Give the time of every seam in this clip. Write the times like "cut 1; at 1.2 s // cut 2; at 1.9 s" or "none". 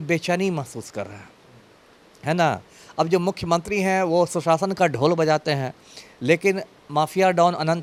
none